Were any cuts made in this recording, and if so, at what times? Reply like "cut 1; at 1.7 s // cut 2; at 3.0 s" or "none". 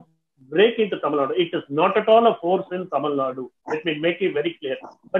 none